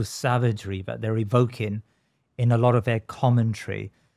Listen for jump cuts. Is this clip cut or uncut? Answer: uncut